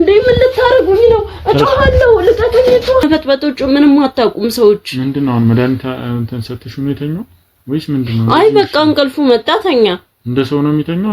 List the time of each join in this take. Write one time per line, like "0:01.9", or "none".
0:03.0